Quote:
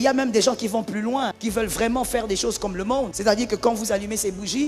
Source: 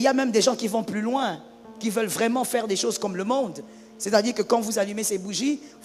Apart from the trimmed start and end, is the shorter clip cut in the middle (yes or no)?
yes